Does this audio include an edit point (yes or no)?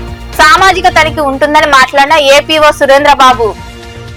no